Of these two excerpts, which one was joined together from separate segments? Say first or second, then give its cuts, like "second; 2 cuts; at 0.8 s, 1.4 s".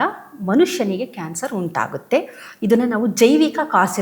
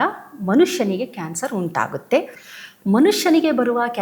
second; 1 cut; at 2.4 s